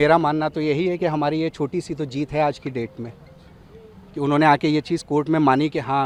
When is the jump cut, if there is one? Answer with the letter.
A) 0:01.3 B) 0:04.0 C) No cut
C